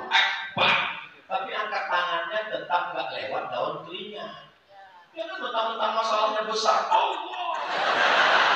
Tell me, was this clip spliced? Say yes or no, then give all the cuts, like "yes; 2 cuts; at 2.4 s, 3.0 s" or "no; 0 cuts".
no; 0 cuts